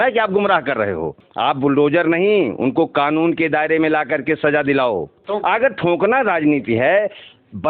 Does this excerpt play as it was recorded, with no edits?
no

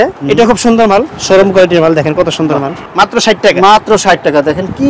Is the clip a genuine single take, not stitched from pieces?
no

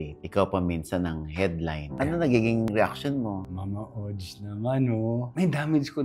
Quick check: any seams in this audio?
yes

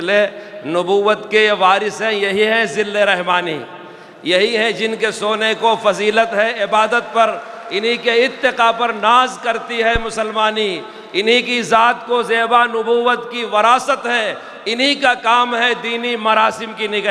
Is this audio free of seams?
yes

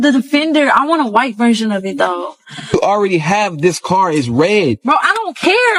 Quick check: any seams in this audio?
no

